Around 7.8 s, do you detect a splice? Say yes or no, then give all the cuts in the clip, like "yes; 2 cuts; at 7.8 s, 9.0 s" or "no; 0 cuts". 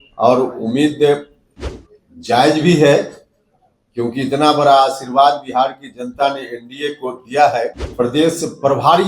yes; 1 cut; at 7.8 s